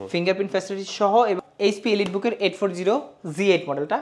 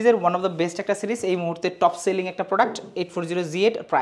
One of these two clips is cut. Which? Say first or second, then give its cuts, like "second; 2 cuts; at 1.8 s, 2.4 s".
first; 1 cut; at 1.5 s